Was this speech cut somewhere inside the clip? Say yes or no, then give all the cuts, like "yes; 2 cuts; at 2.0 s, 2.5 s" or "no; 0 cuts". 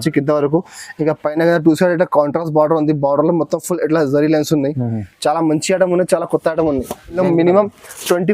yes; 1 cut; at 7.2 s